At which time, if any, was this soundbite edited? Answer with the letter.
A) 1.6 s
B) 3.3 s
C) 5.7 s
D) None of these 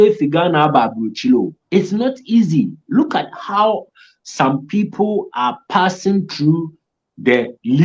A